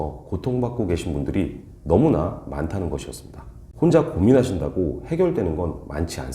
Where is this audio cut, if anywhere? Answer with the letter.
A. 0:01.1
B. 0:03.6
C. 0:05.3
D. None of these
B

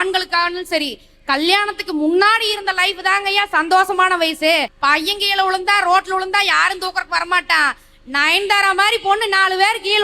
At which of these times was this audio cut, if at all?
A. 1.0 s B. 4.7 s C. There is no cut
B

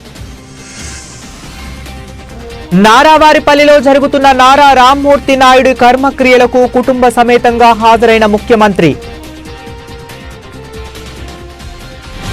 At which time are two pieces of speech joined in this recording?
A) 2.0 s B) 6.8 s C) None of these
A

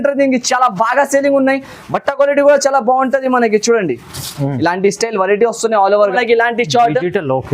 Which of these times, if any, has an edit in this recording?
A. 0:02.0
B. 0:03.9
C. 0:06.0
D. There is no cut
C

